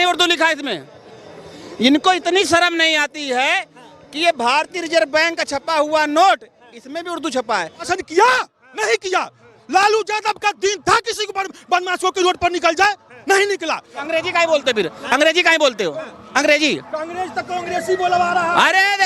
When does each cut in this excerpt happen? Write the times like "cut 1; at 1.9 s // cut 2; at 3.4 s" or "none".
cut 1; at 7.9 s // cut 2; at 13.9 s